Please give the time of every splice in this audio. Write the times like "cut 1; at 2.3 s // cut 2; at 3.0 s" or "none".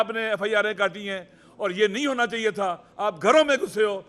none